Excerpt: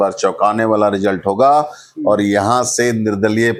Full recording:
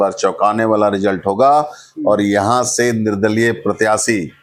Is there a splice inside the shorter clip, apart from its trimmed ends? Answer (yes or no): no